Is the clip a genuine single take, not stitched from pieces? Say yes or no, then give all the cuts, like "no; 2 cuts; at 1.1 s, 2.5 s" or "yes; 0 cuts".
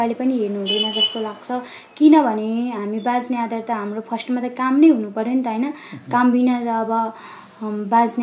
yes; 0 cuts